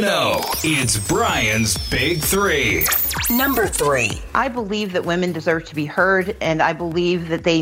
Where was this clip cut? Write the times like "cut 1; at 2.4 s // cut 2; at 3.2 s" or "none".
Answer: cut 1; at 4.2 s